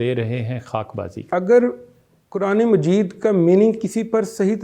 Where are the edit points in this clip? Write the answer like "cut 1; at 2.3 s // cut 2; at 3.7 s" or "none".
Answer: cut 1; at 1.2 s